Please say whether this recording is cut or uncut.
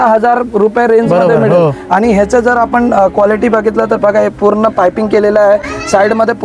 uncut